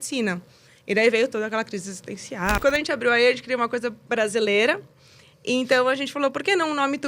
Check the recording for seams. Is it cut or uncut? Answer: cut